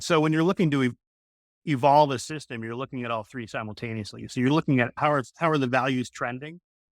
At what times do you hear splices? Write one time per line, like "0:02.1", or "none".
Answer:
0:01.1
0:04.9